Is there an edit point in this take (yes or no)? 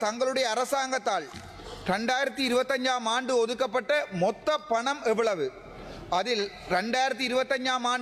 no